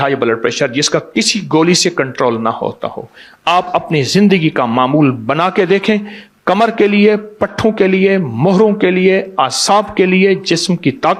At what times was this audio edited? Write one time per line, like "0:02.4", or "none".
none